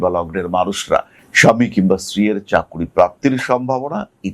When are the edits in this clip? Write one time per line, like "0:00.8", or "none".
0:01.2

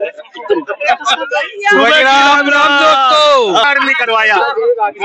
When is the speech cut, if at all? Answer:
0:03.6

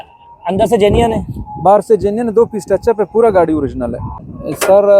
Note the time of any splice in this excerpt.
0:04.0

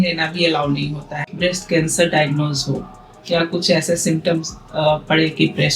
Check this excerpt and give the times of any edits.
0:01.2

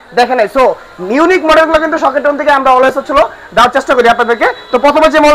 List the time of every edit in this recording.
none

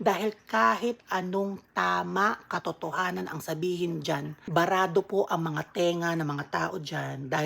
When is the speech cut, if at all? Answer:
0:04.4

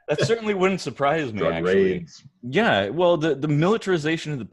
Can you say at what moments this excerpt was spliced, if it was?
0:01.3

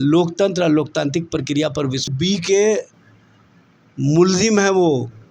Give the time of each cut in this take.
0:02.1

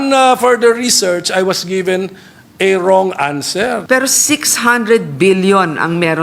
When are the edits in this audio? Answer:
0:03.8

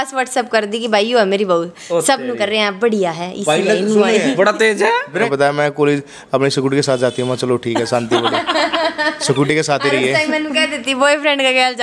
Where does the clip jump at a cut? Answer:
0:05.3

